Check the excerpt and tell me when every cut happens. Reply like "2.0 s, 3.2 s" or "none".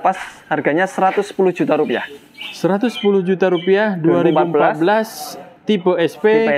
none